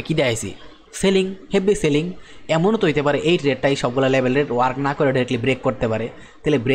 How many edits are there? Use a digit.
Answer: 0